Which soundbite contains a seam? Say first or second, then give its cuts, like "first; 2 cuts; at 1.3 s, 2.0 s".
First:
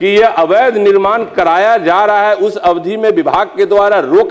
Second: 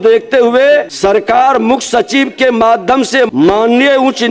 second; 2 cuts; at 0.9 s, 3.3 s